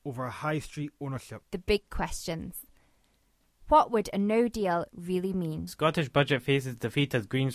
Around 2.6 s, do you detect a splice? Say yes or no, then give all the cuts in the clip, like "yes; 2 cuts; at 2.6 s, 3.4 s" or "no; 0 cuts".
no; 2 cuts; at 1.3 s, 5.7 s